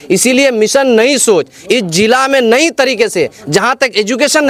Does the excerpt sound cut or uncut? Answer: uncut